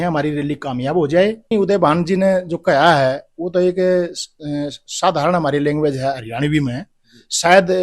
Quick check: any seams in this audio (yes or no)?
yes